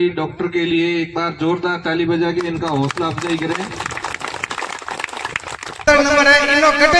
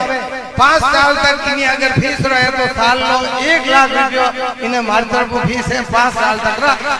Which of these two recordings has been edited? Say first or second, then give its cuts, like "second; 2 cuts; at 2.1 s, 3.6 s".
first; 1 cut; at 5.8 s